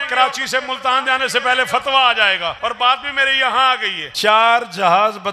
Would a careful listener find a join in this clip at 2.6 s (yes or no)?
yes